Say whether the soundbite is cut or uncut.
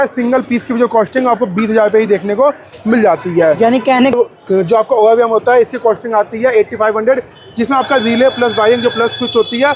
cut